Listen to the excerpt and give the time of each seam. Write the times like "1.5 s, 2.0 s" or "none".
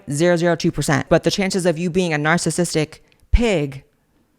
1.1 s